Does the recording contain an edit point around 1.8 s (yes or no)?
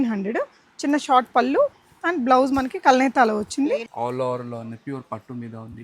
no